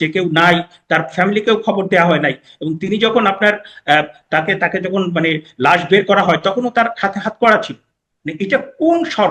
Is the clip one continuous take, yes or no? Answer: yes